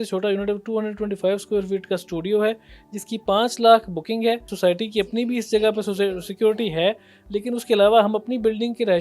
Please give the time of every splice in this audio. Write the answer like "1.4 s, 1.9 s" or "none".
4.5 s